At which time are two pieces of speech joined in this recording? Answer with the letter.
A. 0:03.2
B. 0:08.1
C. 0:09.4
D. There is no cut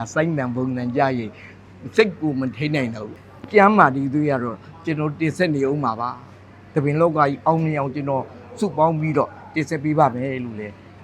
A